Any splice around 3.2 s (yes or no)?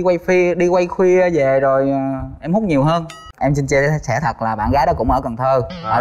yes